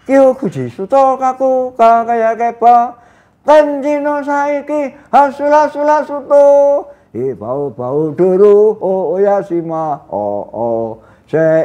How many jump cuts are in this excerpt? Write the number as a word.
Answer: zero